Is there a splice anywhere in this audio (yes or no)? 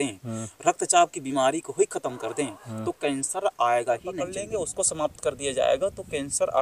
yes